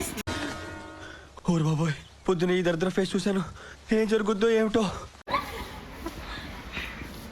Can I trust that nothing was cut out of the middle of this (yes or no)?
yes